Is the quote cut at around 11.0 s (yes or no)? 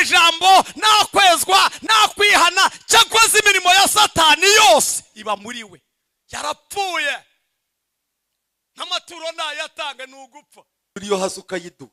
yes